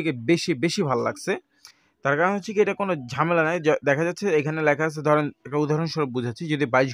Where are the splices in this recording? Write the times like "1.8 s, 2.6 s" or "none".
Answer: none